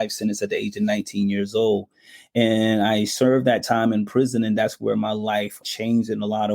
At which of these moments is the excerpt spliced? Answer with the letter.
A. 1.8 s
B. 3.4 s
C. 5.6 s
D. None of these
C